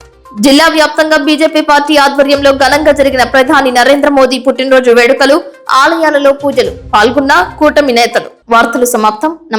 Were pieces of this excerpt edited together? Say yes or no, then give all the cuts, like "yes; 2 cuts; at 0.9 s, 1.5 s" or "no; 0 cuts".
no; 0 cuts